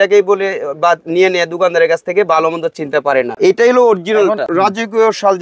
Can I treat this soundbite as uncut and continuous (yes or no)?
no